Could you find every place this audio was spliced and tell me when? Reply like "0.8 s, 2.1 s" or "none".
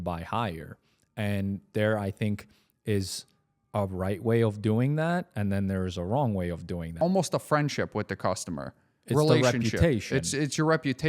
6.9 s